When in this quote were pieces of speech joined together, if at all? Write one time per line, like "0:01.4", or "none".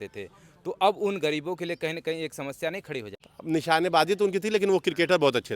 0:03.1

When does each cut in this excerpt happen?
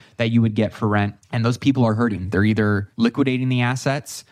0:01.2
0:02.9

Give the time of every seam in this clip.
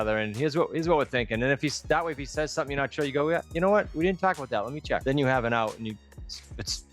0:05.0

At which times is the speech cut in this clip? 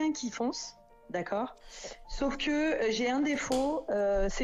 none

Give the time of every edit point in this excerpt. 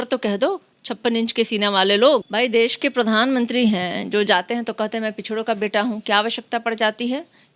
0:02.3

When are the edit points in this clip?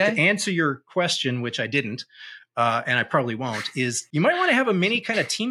0:04.0

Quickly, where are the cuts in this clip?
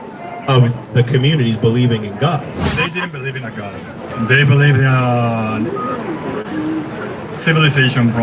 0:02.7

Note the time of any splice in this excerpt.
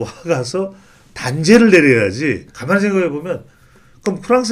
0:02.5

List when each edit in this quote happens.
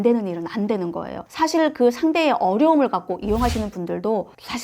0:01.2

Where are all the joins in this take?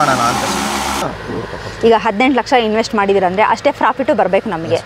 0:01.0

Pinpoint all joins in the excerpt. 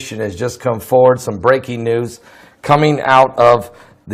0:03.0

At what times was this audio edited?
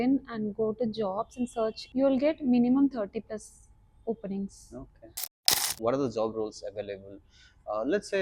0:01.8
0:05.5

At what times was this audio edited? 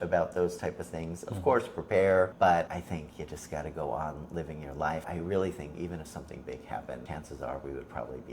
0:02.6
0:05.1
0:07.0

